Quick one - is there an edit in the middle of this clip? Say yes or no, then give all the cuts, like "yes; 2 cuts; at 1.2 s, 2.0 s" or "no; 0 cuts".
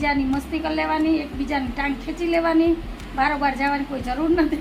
no; 0 cuts